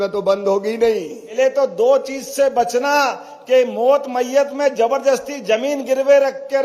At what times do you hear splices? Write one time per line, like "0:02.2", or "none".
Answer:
0:01.2